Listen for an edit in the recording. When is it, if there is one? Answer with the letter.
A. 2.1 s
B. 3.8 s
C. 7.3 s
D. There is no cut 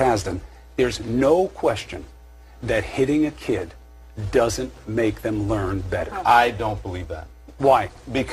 B